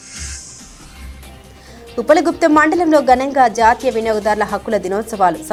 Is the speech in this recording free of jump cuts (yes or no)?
yes